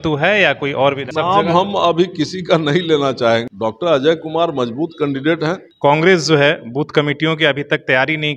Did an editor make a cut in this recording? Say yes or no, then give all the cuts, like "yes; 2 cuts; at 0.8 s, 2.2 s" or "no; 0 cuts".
yes; 3 cuts; at 1.1 s, 3.5 s, 5.7 s